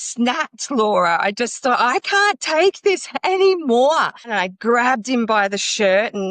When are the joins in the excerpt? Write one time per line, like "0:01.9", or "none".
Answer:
0:04.3